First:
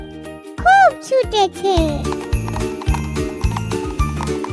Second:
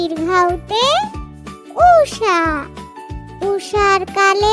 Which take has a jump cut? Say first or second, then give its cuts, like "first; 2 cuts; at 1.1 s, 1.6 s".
first; 1 cut; at 2.0 s